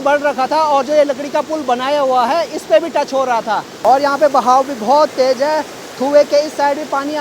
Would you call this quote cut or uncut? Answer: uncut